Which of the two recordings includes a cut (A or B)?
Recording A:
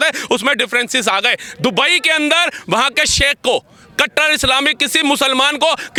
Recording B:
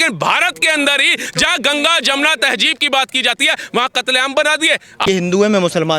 B